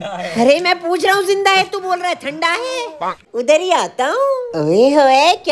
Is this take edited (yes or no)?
yes